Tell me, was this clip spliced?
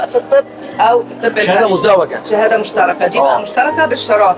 no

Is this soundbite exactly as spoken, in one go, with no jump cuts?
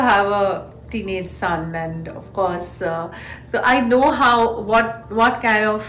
yes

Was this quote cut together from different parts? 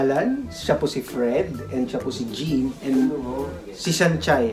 no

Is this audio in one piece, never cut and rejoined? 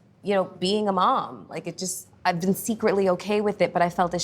no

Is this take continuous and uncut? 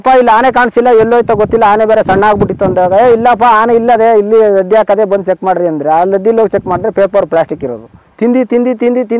no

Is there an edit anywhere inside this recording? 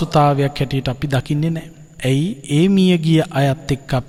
no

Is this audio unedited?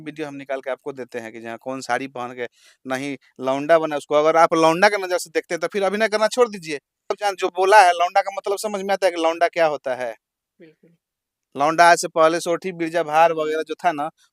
no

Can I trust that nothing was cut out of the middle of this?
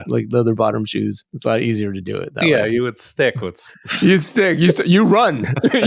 yes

